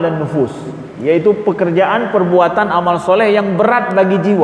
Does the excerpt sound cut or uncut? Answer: uncut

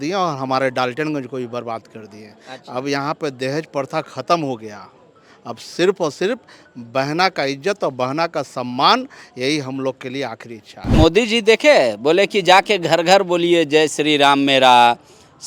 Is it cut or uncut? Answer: cut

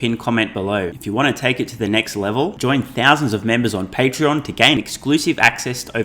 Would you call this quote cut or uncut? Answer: cut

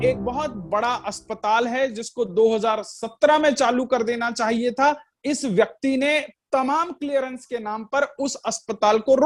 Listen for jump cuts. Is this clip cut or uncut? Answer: uncut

